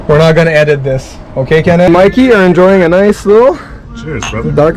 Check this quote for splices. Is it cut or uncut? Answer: cut